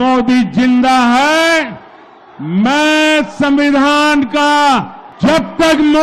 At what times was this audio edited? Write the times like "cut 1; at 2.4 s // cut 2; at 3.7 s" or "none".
cut 1; at 5.0 s